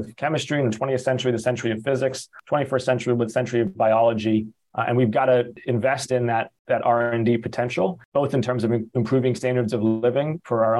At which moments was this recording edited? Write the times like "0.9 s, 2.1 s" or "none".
2.3 s, 4.6 s, 5.6 s, 6.6 s, 8.0 s